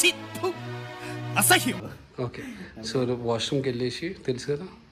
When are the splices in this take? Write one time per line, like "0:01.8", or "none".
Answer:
0:01.8